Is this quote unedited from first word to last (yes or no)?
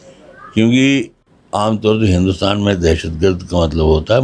no